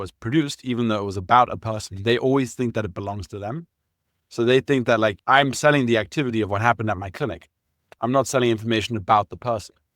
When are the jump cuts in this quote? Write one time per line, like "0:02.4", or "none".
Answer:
0:05.2

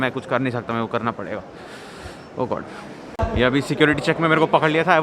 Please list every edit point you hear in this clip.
0:02.9

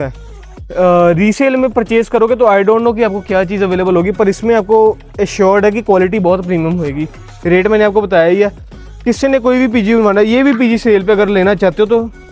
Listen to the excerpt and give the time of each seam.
none

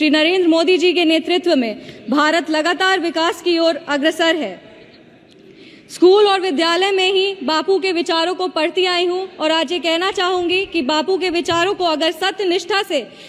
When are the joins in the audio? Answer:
none

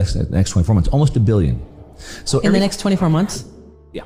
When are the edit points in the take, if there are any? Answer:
none

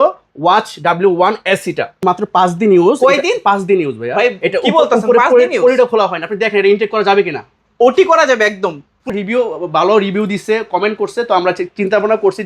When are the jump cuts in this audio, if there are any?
0:02.0
0:09.1

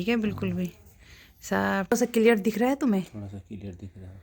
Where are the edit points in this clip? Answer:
0:01.9

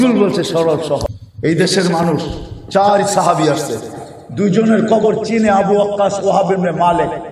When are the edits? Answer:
0:01.2

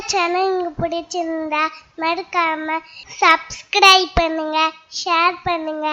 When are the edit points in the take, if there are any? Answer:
none

